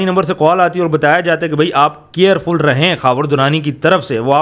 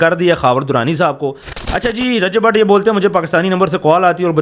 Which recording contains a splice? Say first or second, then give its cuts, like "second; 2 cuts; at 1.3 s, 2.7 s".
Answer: second; 1 cut; at 1.4 s